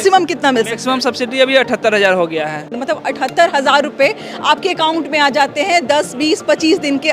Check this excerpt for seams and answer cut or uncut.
cut